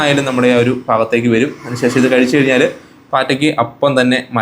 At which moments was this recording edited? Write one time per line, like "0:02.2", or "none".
none